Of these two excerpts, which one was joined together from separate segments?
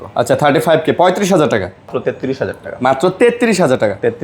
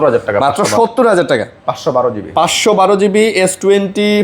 first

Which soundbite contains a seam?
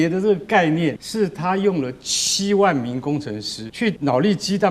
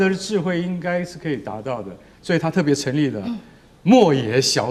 first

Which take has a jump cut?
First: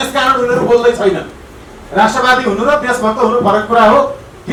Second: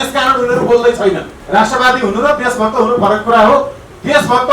second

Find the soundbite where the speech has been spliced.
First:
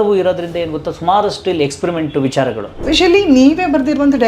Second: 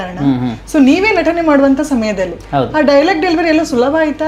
first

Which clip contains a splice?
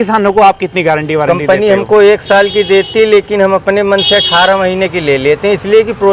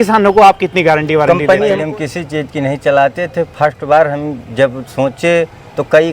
second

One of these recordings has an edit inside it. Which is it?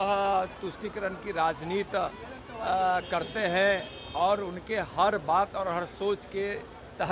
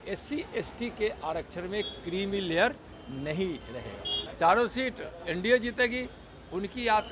second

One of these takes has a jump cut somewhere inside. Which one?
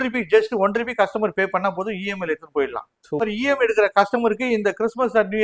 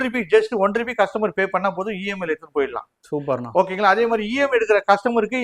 first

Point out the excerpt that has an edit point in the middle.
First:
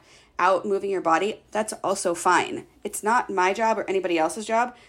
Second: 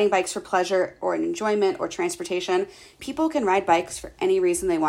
second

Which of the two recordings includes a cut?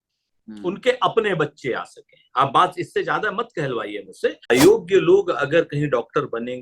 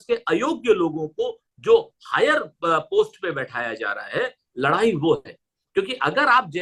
first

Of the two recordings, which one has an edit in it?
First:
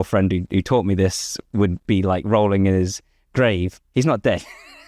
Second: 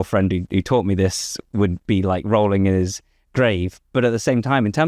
first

